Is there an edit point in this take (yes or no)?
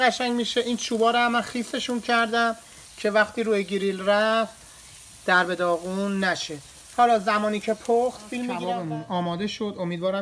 yes